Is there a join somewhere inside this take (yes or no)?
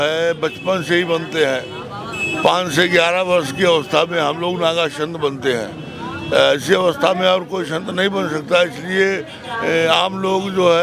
no